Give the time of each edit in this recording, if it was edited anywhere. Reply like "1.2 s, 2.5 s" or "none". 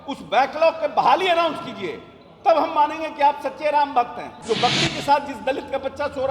4.2 s